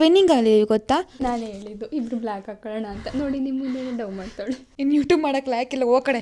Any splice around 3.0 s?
no; 2 cuts; at 1.2 s, 4.7 s

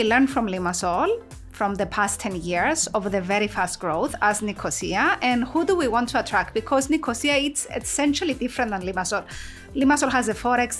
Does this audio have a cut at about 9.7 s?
no; 0 cuts

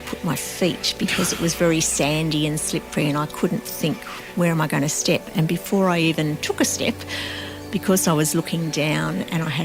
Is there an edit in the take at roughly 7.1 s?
no; 0 cuts

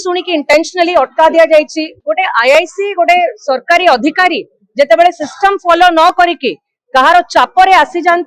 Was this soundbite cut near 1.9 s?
yes; 1 cut; at 1.9 s

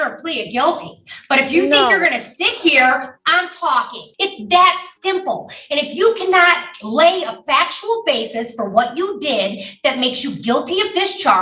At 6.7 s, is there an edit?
no; 1 cut; at 4.0 s

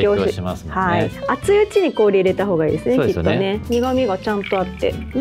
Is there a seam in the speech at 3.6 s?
yes; 2 cuts; at 1.2 s, 3.6 s

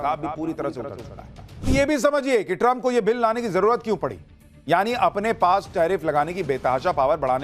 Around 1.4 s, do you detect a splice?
yes; 1 cut; at 1.4 s

